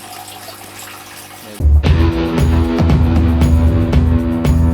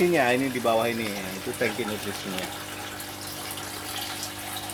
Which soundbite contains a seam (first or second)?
first